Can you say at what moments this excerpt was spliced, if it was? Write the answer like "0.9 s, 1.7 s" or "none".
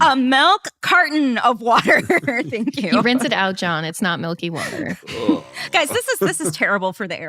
2.9 s